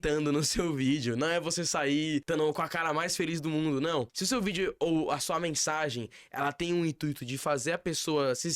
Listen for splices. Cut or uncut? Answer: cut